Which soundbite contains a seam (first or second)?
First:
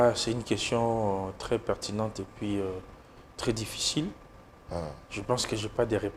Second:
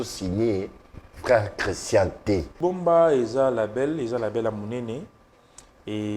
second